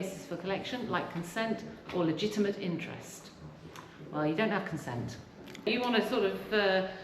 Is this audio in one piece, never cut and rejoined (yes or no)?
no